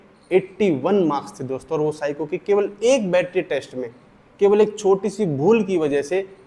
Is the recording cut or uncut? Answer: uncut